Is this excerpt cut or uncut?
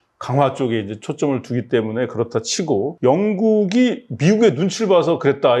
cut